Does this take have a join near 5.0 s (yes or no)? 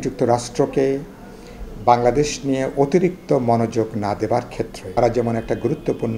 yes